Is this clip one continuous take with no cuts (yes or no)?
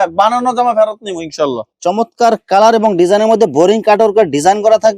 no